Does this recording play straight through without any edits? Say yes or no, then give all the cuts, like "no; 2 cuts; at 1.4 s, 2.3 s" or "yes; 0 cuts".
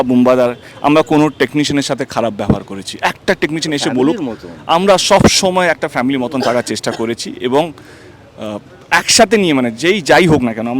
yes; 0 cuts